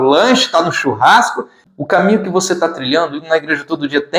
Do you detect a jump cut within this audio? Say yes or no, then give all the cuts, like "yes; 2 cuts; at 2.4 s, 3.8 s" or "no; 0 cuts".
yes; 1 cut; at 1.6 s